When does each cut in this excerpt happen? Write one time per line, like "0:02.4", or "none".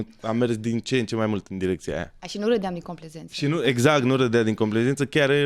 none